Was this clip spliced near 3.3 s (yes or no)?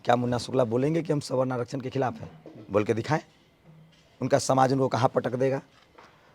no